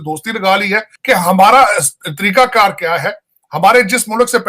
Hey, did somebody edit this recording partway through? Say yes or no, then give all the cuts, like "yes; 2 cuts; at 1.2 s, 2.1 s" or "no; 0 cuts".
yes; 1 cut; at 0.9 s